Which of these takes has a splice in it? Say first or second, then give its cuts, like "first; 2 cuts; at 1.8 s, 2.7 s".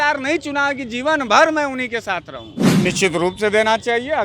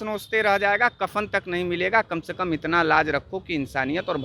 first; 1 cut; at 2.8 s